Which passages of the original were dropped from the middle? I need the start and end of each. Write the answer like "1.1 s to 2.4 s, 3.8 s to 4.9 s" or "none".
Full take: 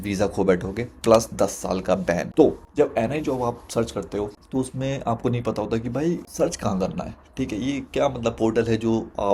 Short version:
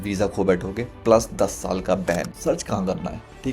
2.3 s to 6.2 s